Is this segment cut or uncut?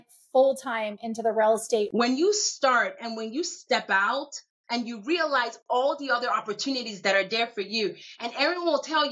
cut